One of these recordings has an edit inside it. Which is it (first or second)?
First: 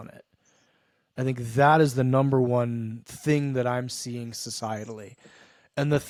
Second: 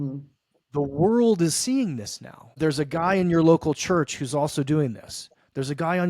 second